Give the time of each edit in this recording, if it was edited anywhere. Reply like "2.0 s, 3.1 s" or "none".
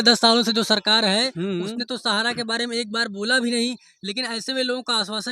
none